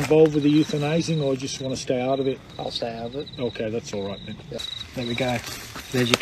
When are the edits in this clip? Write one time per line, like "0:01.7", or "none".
0:04.6

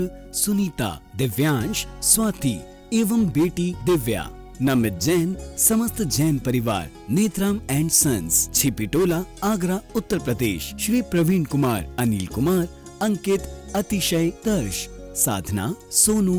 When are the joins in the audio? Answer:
none

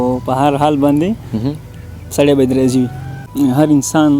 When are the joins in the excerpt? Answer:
0:03.2

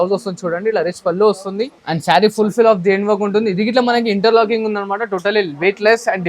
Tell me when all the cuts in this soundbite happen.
0:01.8

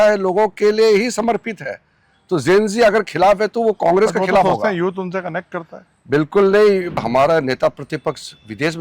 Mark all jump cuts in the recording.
0:07.0

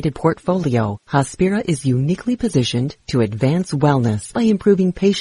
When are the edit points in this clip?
0:01.0
0:04.2

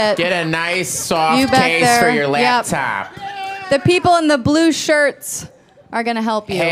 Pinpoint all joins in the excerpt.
none

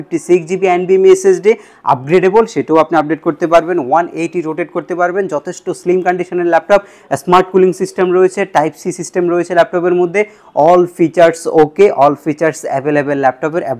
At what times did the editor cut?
none

